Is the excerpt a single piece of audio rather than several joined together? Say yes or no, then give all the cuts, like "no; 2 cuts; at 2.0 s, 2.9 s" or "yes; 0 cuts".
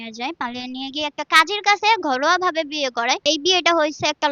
no; 1 cut; at 3.2 s